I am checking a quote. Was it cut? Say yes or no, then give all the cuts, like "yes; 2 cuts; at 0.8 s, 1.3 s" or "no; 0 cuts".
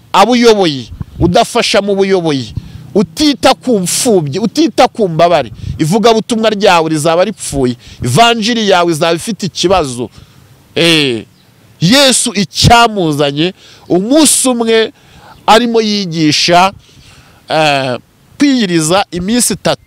yes; 1 cut; at 18.3 s